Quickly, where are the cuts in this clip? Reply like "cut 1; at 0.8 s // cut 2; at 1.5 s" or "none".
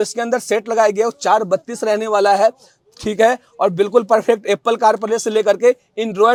none